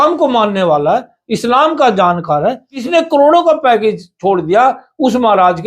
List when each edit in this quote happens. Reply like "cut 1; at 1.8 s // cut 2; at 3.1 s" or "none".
cut 1; at 2.8 s